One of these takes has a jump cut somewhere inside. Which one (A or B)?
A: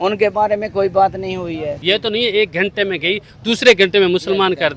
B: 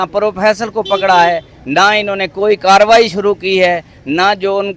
A